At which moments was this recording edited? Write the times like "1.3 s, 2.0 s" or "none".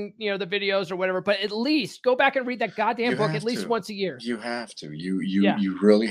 none